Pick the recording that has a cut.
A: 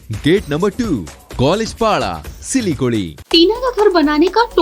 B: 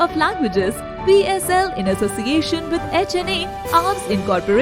A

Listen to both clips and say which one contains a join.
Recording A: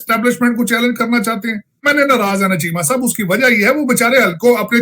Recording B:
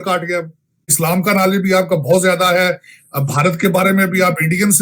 A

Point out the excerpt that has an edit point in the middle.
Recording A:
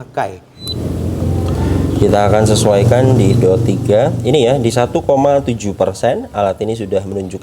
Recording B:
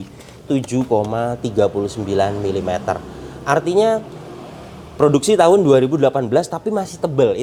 A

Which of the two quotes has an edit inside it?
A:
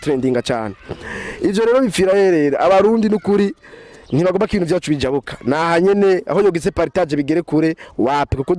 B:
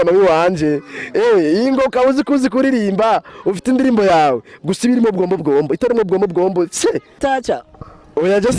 B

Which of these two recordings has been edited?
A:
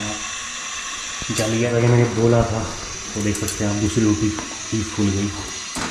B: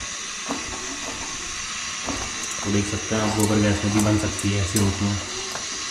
A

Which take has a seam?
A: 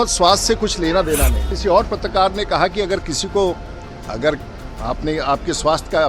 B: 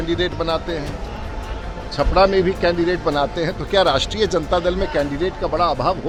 A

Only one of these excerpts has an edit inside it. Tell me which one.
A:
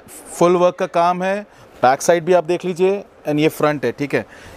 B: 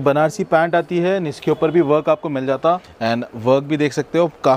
B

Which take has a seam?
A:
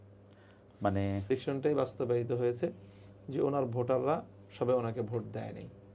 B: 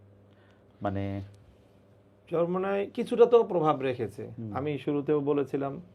A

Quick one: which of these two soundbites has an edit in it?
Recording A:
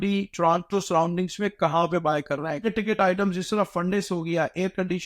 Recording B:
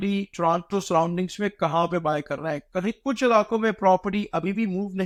A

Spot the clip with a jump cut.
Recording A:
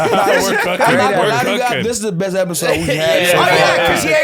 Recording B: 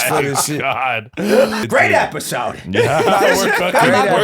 B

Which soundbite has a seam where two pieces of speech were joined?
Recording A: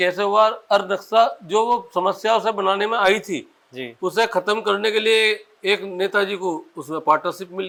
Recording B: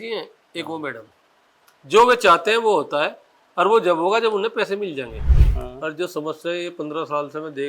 B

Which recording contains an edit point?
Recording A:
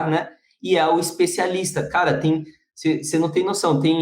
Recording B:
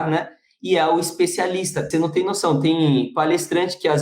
B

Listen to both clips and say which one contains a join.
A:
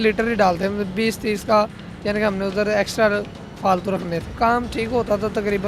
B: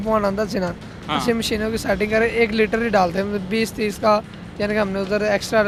A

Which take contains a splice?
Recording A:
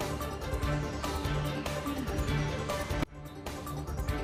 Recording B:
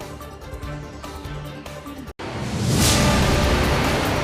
B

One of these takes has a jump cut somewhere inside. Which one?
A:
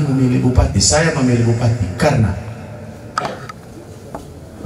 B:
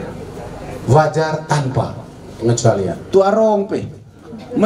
B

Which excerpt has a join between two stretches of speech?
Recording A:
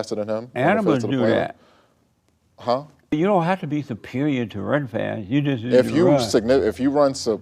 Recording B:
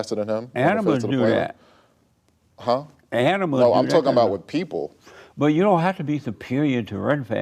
A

